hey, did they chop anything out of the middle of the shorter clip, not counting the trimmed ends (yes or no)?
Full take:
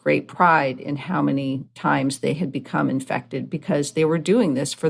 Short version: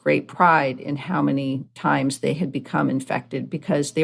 no